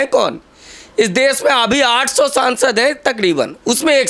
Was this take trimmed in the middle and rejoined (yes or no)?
no